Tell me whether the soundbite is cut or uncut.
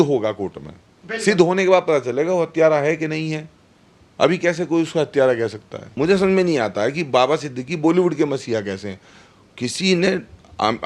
cut